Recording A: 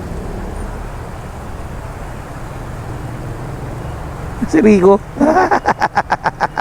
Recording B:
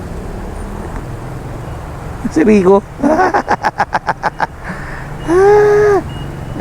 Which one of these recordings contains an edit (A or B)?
B